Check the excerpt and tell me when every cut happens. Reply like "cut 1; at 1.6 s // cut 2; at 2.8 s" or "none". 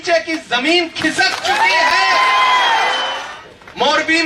cut 1; at 3.1 s